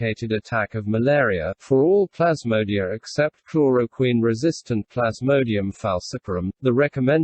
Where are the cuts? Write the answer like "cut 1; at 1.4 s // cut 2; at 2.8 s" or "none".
cut 1; at 1.0 s